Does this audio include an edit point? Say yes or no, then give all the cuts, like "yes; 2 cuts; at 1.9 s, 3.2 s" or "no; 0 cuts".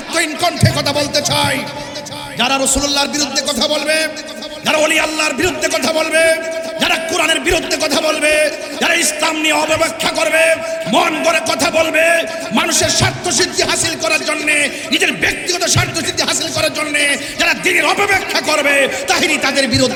no; 0 cuts